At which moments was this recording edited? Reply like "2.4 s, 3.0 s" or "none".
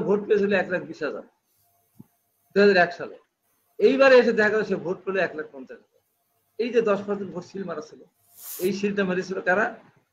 none